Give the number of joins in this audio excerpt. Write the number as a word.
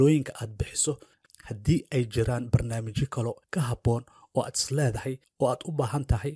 two